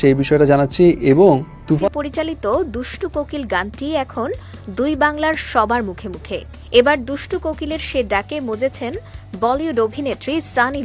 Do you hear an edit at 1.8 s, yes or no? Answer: yes